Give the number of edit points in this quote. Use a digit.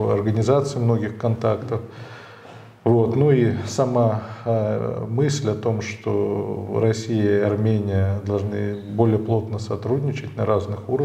0